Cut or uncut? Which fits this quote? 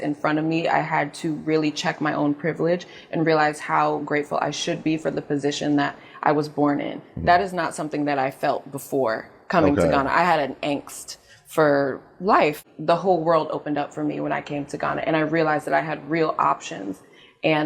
cut